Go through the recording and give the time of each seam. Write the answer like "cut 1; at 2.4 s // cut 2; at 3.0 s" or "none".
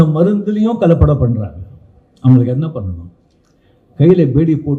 none